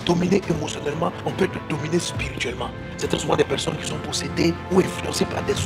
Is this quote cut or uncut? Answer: cut